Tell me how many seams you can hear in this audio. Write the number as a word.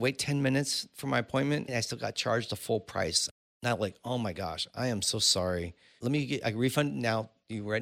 three